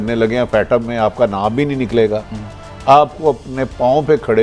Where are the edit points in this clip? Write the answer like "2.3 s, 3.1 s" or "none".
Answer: none